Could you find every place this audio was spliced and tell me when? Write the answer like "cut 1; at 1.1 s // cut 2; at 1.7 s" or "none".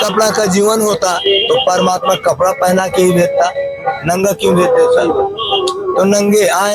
none